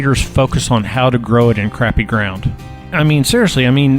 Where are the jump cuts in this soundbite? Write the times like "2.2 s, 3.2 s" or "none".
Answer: 2.8 s